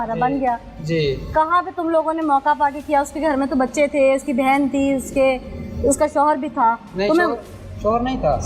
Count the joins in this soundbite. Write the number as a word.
zero